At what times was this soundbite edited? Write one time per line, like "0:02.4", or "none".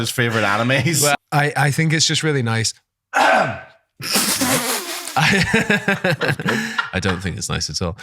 0:01.1